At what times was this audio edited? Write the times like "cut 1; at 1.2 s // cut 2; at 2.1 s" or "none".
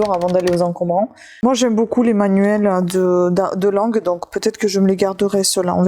cut 1; at 1.3 s